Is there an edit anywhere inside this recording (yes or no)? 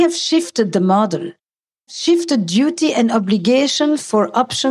yes